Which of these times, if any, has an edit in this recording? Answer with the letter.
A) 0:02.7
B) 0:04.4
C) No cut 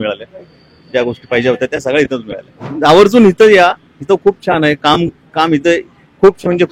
A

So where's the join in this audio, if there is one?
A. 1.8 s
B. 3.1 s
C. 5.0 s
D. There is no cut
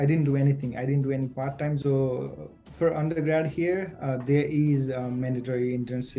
A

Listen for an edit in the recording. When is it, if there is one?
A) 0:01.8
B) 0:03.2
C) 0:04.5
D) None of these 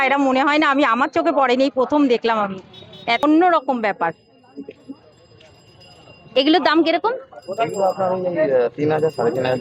B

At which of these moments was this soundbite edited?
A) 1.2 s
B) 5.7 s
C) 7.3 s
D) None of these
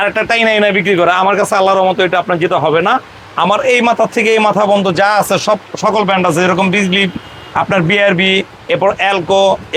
D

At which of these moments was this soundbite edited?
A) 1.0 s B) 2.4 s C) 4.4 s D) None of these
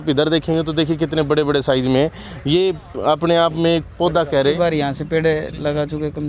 C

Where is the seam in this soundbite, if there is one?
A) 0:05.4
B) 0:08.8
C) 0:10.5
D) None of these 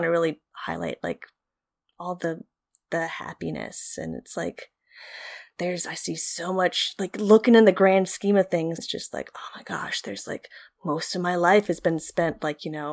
B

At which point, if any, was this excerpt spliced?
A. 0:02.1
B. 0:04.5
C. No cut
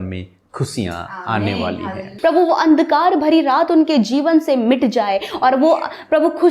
A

